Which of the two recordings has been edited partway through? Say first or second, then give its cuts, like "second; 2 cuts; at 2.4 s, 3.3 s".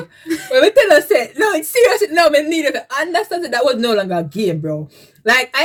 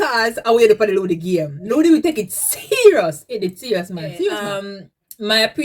second; 1 cut; at 4.5 s